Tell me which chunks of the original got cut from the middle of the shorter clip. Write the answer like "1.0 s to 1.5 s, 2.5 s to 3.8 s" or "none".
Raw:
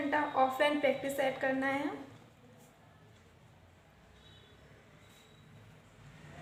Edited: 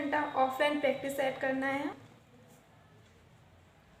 1.9 s to 2.0 s